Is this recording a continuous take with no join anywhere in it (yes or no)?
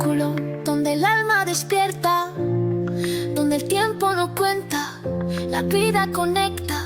yes